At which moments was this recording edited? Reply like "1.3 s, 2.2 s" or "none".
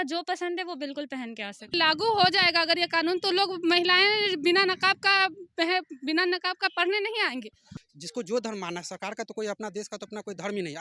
1.7 s, 7.7 s